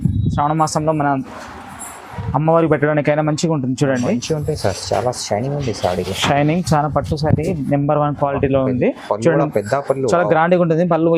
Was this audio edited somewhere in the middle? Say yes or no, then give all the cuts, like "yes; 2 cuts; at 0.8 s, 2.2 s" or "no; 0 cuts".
no; 0 cuts